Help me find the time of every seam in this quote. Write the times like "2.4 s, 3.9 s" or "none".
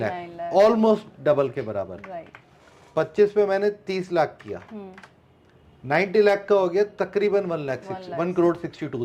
none